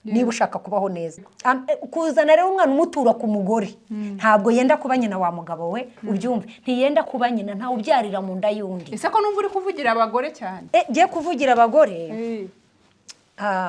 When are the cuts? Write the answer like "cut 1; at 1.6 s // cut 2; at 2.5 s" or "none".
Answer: cut 1; at 1.2 s // cut 2; at 10.6 s